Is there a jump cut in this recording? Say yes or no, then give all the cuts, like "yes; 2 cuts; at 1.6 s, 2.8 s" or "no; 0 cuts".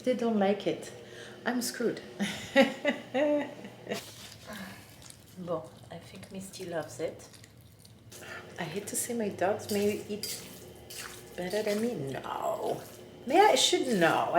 yes; 2 cuts; at 4.1 s, 8.1 s